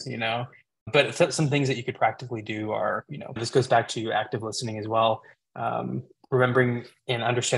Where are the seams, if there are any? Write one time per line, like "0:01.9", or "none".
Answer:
0:00.8
0:03.1